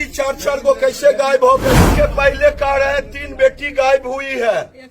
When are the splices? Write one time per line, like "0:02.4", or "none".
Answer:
0:01.9